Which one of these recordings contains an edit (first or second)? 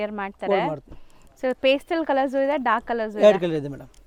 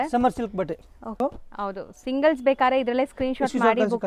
second